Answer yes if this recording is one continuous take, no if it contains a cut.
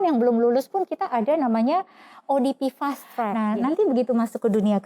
no